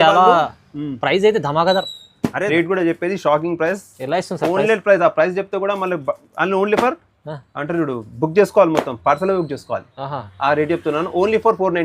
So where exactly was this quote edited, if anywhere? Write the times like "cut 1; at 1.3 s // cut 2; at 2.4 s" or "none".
cut 1; at 2.5 s